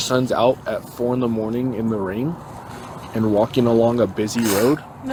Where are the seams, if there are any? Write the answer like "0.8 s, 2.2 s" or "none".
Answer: none